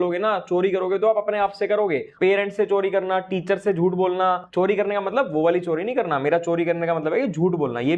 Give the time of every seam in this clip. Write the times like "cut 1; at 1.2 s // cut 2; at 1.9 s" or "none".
none